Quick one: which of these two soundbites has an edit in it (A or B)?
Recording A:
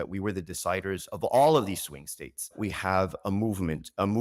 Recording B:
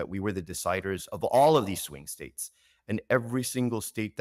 A